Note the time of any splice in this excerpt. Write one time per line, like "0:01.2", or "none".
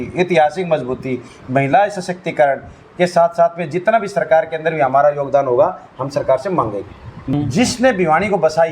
0:07.3